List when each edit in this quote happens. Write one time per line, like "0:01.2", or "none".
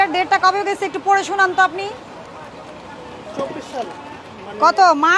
none